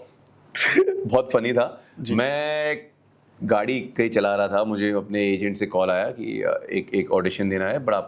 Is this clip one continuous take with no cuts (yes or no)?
yes